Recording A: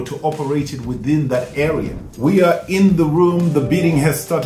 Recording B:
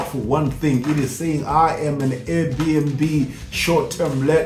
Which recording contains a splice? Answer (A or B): A